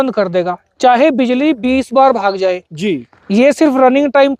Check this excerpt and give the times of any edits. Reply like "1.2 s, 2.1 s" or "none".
none